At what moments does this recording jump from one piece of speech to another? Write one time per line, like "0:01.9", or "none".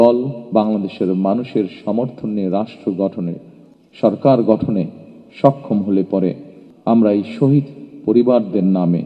none

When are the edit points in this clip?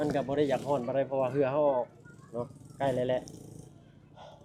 none

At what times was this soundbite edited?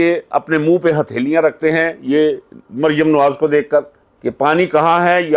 none

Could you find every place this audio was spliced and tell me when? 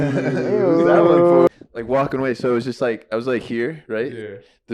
0:01.5

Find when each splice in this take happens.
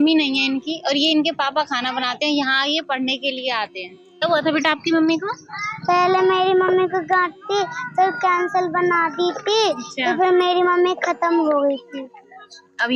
0:04.1

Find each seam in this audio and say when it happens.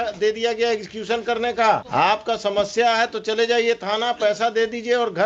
none

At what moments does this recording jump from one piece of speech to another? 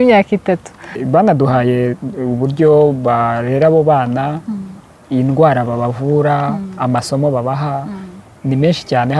0:01.0

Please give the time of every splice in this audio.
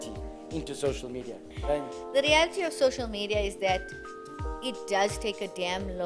0:01.5

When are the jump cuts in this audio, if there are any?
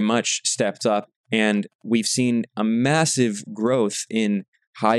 0:01.2

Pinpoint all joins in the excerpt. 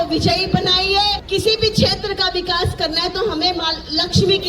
0:01.2

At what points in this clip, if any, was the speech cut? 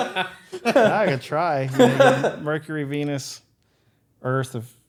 none

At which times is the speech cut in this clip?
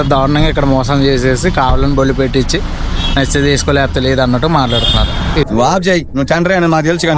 0:05.4

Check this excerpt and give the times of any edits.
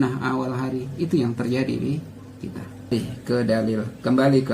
0:02.9

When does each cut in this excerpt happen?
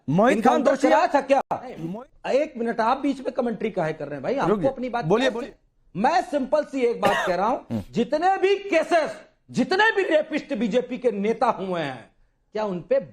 0:01.8
0:05.4

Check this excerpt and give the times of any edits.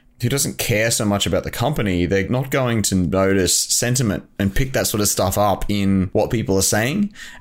0:02.3
0:06.1

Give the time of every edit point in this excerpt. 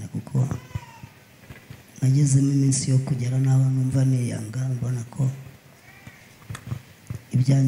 none

